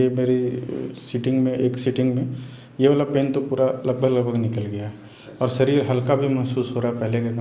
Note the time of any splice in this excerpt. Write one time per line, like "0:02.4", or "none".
none